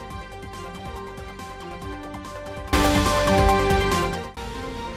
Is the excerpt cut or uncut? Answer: uncut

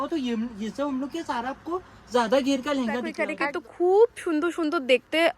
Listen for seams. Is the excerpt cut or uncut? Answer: cut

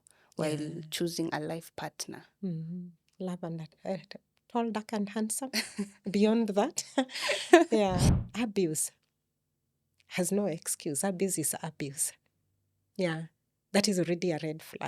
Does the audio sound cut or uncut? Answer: cut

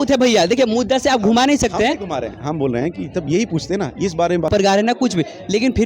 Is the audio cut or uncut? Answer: cut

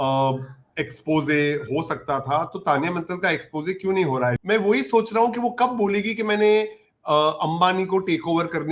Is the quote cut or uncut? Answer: cut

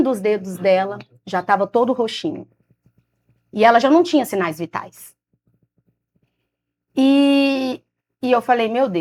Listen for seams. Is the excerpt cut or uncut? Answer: uncut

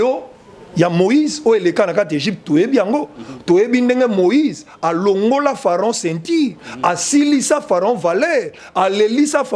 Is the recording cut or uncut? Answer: uncut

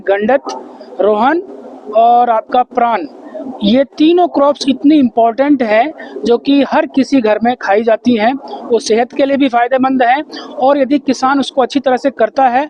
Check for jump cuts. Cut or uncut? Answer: uncut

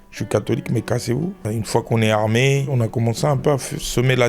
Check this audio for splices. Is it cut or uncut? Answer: cut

